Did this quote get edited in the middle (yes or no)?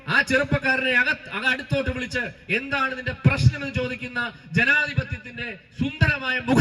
no